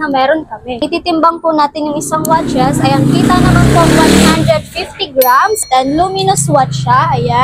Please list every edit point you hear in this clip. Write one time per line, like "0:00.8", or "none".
0:00.8
0:05.6